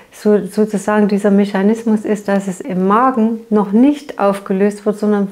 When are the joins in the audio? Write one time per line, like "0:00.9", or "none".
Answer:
0:02.6

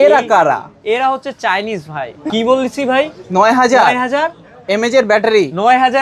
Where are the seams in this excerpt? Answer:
0:02.3

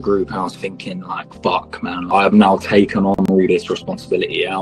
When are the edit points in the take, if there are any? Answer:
0:01.2
0:02.0

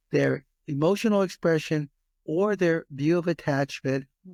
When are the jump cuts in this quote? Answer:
none

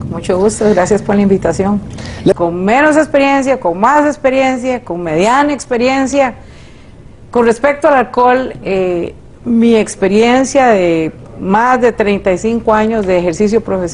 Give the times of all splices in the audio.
none

